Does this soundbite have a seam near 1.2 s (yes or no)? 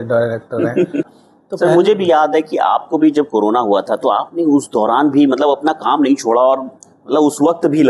yes